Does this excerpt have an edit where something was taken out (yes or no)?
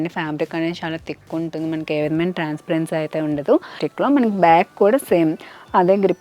yes